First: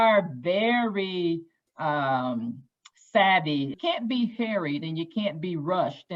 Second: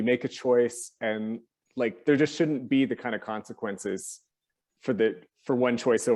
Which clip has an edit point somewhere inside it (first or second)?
first